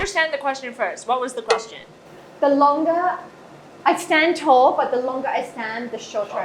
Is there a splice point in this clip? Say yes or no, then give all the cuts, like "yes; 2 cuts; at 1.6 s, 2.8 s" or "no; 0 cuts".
no; 0 cuts